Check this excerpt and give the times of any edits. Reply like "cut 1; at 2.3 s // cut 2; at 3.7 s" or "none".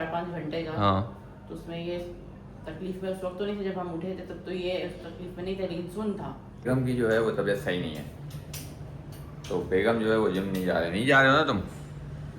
cut 1; at 6.7 s